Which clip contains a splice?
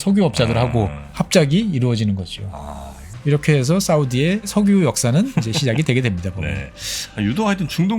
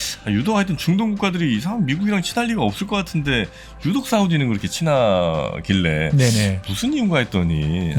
first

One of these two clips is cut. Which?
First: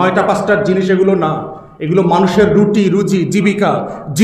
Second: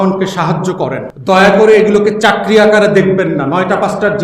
second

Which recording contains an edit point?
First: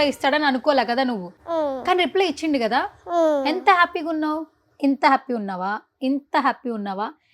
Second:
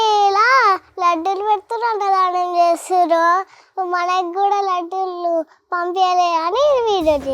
first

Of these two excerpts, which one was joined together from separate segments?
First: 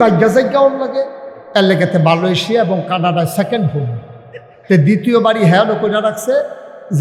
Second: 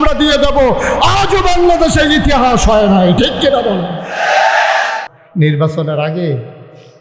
second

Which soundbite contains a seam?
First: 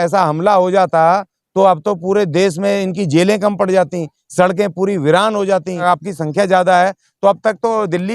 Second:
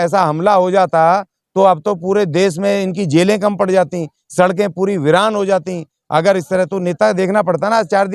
first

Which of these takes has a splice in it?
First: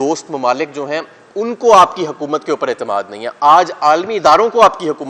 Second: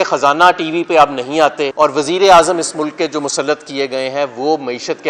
second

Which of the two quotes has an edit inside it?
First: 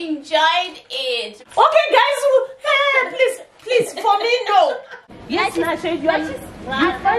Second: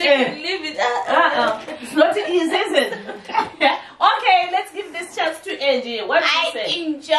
first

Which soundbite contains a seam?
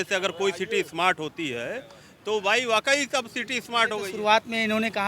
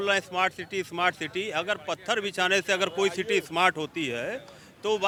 first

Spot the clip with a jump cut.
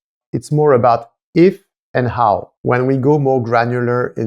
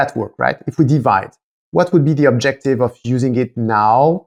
first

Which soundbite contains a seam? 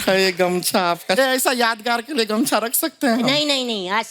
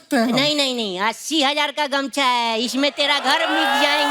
first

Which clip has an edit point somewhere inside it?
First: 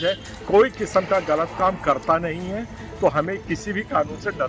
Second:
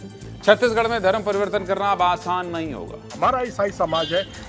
second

